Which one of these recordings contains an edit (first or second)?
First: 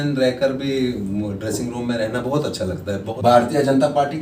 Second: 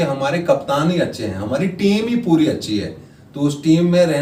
first